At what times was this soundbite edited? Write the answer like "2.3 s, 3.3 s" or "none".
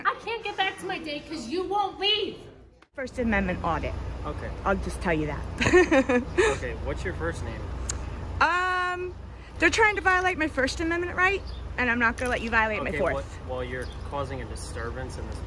3.1 s